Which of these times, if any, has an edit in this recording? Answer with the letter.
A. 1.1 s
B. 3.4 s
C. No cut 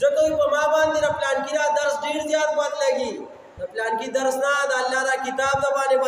C